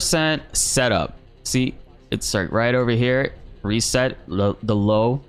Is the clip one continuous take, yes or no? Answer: yes